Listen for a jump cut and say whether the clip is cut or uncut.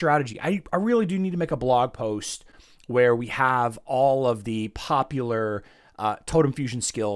uncut